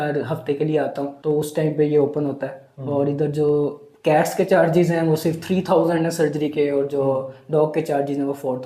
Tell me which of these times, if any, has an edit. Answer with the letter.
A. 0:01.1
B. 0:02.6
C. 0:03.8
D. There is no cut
A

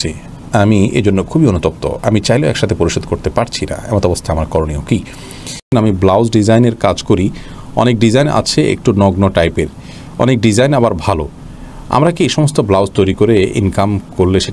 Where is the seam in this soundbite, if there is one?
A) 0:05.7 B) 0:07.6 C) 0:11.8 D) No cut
A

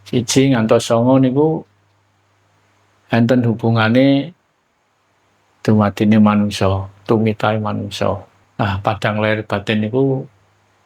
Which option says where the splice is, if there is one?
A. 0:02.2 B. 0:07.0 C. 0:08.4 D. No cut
C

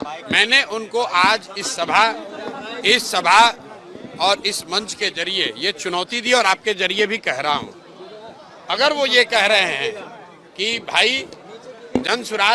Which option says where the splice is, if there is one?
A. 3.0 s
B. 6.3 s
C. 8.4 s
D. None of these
D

